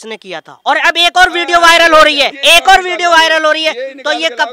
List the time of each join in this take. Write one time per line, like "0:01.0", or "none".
0:02.3